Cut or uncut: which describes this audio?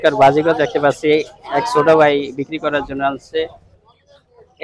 uncut